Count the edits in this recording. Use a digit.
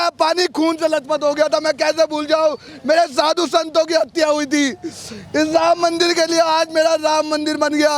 0